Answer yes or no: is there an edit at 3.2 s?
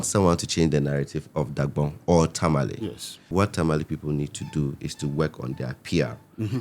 yes